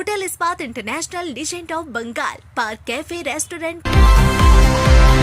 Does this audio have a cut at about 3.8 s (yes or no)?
yes